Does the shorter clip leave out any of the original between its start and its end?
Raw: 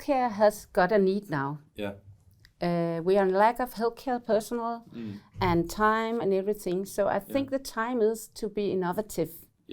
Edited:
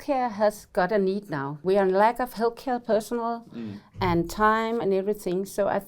yes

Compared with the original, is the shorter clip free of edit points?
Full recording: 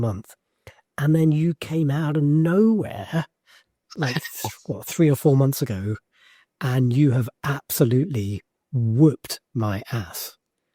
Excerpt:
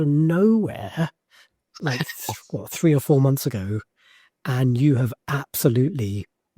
yes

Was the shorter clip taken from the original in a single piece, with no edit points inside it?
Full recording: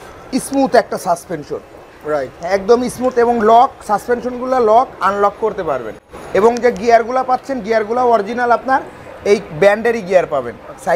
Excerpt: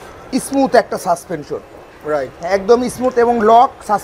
yes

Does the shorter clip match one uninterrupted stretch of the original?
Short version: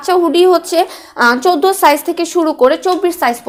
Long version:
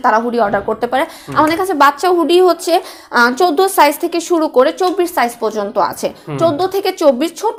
yes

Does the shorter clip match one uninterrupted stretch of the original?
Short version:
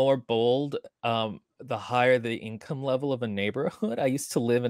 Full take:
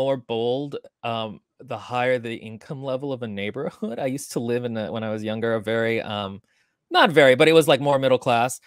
yes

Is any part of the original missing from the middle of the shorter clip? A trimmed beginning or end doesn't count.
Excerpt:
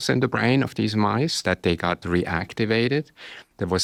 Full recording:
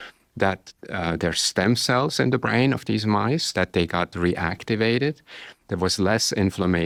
no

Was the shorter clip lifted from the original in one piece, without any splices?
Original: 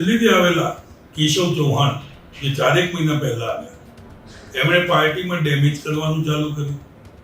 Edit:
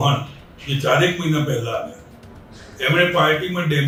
yes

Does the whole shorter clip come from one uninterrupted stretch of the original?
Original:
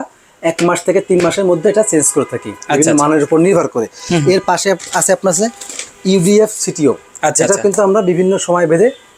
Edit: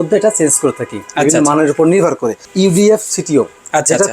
no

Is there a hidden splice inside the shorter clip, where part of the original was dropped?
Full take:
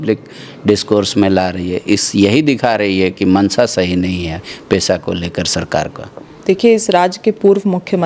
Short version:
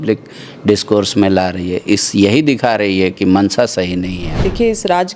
yes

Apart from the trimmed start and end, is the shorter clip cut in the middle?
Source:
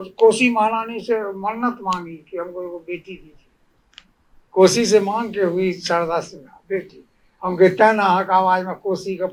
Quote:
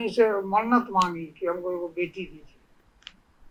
no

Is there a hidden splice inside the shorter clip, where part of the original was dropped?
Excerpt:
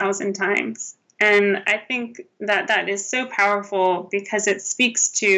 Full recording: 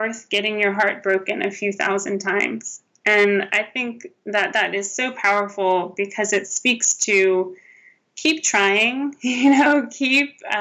no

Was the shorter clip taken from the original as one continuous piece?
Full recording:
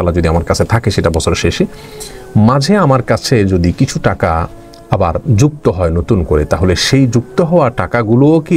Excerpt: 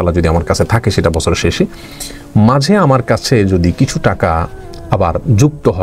yes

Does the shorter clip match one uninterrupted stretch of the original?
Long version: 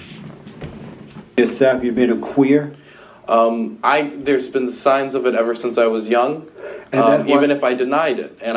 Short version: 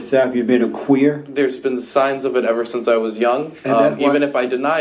no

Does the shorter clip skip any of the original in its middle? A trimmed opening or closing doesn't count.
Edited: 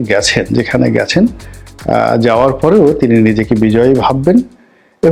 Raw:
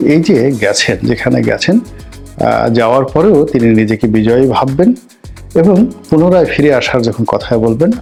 no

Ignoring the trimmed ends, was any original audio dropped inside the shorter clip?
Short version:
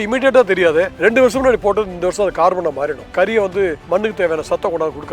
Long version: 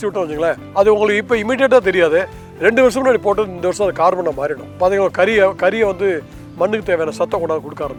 yes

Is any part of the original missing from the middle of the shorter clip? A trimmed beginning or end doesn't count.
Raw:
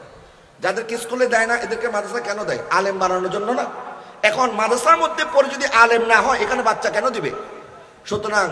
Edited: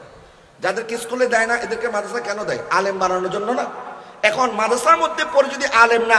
no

